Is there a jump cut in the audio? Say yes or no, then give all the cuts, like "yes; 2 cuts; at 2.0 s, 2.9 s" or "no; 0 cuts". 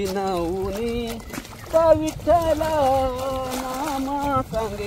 no; 0 cuts